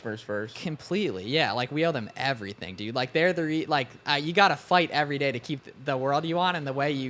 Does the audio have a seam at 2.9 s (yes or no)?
no